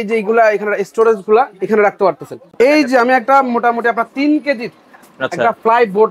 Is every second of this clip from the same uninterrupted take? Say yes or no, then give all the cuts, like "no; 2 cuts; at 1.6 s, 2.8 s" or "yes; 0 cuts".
no; 1 cut; at 2.4 s